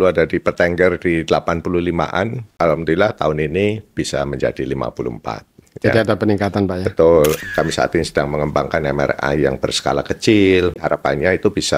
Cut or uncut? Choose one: cut